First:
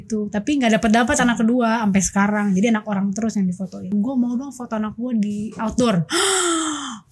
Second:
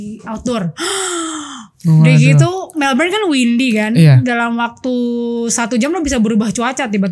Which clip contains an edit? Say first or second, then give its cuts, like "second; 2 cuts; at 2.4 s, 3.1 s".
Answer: first; 1 cut; at 3.9 s